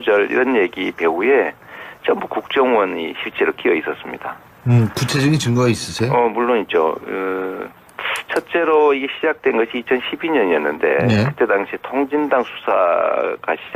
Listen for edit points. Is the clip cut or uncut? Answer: uncut